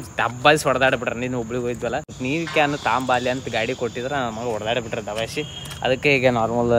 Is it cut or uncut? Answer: uncut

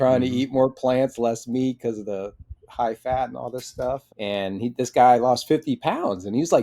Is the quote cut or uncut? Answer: cut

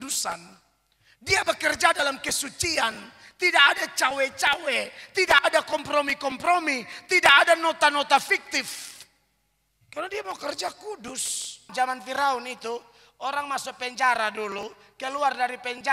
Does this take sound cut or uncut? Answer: cut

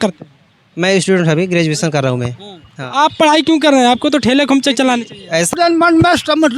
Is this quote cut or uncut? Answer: cut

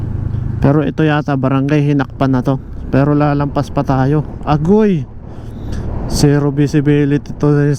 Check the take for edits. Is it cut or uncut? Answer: uncut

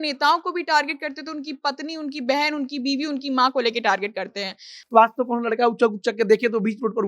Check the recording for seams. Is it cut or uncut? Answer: cut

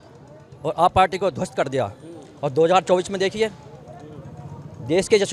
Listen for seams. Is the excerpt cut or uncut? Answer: uncut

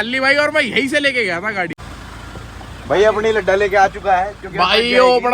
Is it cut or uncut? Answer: cut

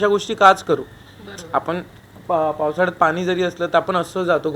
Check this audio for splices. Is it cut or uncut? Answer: uncut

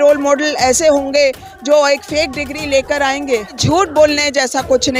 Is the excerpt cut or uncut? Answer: cut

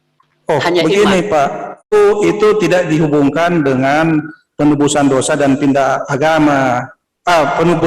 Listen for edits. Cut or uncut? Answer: cut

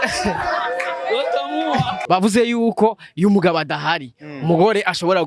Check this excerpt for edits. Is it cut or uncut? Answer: cut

